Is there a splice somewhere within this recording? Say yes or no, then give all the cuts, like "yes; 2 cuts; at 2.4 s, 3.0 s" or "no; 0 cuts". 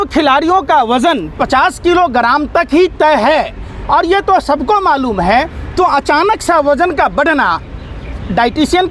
no; 0 cuts